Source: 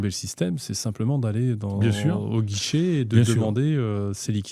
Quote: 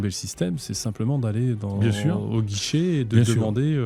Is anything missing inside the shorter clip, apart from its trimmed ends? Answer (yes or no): no